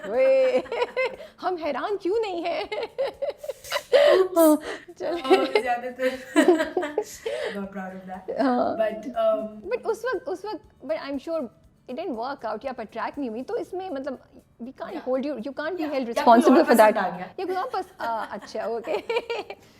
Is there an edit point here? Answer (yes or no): no